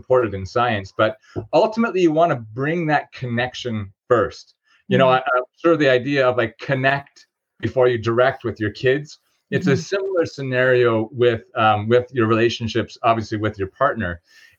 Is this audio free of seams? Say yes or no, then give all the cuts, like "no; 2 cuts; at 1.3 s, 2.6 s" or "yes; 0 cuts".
yes; 0 cuts